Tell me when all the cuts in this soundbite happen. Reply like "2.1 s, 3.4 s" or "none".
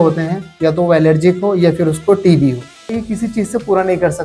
3.0 s